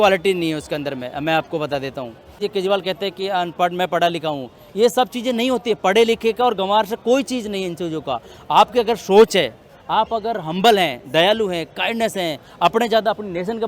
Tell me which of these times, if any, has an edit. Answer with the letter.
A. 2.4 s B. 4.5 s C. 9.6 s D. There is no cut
A